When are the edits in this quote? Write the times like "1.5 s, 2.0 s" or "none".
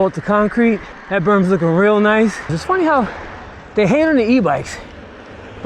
0.9 s, 2.6 s